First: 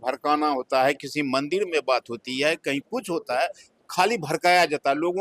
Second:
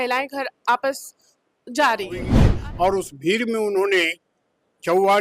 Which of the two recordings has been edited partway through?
second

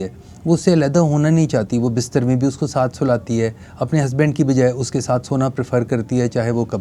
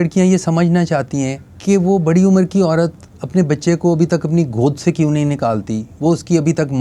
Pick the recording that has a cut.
second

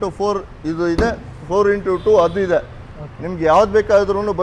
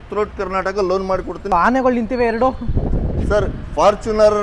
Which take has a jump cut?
second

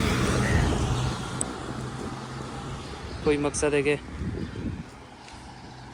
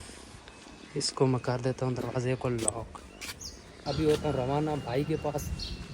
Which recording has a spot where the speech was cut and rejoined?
second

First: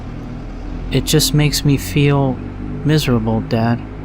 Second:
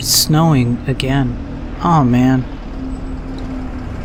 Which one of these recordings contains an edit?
first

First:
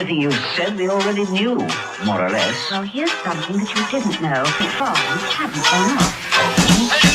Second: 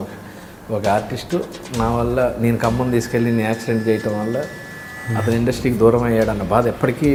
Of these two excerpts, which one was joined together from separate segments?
first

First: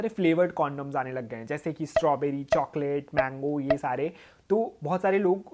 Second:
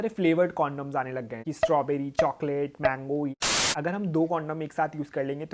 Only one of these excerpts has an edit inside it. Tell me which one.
second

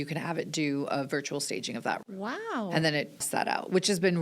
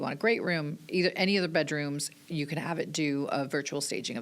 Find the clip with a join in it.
first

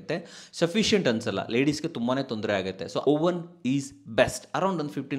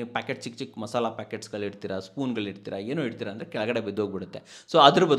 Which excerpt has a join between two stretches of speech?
first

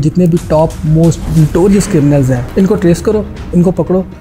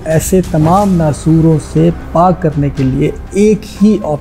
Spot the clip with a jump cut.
first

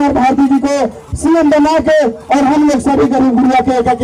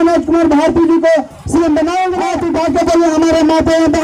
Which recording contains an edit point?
second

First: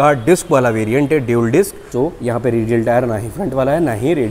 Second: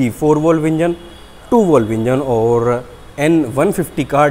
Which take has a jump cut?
first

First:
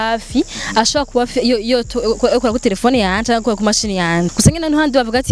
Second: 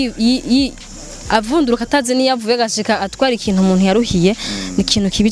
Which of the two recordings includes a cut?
first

